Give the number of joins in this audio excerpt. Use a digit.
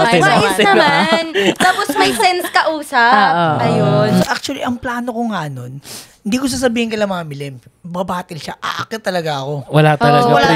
1